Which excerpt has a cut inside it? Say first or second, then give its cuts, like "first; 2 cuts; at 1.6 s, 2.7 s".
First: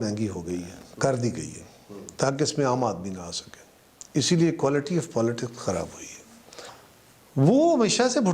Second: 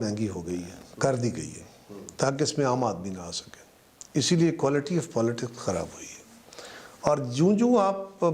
first; 1 cut; at 6.7 s